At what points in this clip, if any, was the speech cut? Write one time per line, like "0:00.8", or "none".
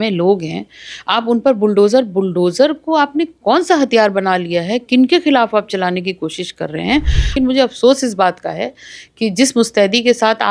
0:07.3